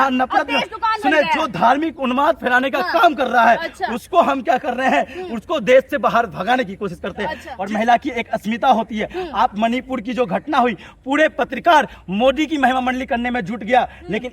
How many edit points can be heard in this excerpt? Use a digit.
1